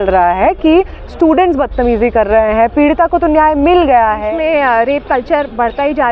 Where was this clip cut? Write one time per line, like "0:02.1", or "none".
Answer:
0:04.2